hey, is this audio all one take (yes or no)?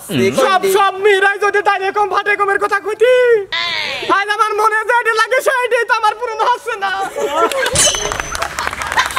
yes